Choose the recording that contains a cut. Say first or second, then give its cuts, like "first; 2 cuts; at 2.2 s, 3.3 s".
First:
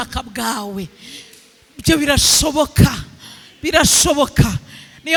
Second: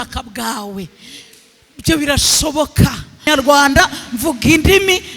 second; 1 cut; at 3.3 s